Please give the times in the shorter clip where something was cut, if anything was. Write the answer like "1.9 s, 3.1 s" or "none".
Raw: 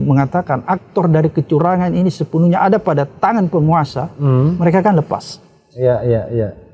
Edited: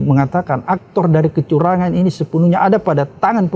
none